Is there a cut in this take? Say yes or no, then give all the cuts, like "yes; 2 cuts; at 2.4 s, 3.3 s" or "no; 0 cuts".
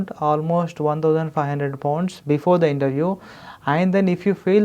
no; 0 cuts